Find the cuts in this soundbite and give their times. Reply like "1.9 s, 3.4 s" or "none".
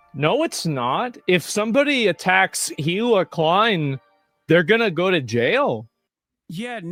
none